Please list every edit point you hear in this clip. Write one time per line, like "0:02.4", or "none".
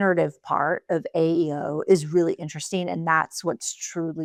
none

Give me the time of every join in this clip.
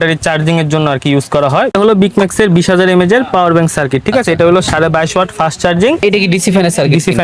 0:01.7
0:06.0

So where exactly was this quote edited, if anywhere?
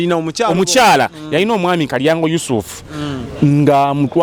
none

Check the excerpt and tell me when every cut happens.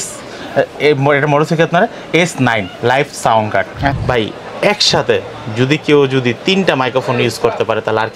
0:04.0

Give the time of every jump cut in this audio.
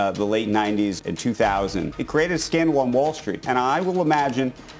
0:01.0
0:02.0
0:03.4

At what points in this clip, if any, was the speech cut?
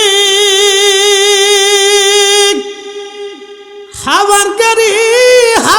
none

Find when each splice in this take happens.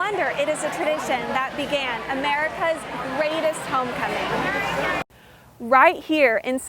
0:05.2

